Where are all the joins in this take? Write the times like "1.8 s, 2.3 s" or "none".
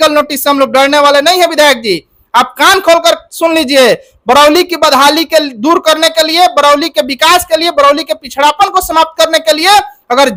none